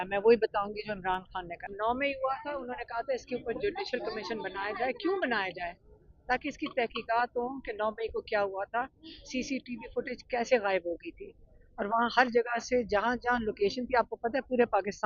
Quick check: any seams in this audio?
yes; 1 cut; at 1.7 s

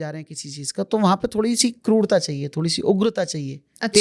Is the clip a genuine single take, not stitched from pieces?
yes; 0 cuts

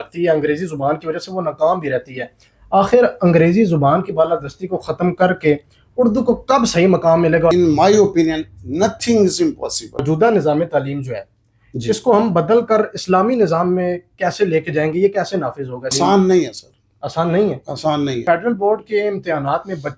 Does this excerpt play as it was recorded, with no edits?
no; 4 cuts; at 7.5 s, 10.0 s, 15.9 s, 18.2 s

